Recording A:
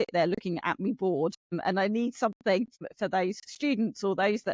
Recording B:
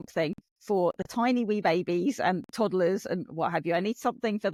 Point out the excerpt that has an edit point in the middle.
A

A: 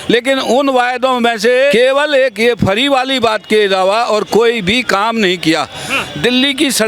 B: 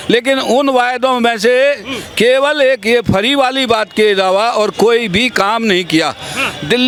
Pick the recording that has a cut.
A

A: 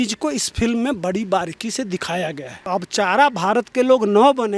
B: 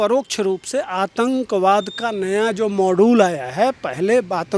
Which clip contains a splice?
A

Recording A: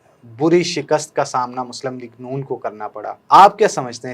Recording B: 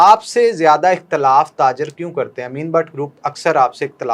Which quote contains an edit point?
A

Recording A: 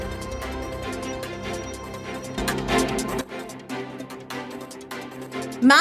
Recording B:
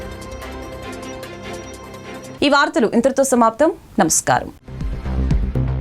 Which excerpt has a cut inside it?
A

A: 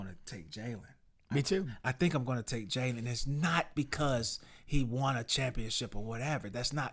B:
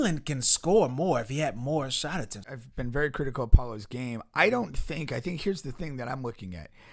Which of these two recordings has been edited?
B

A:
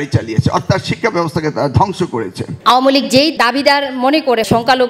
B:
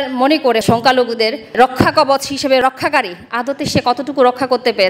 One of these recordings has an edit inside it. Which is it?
A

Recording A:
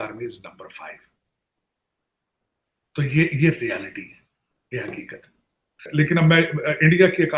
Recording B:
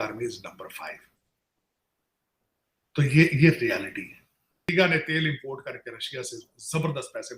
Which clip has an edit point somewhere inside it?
B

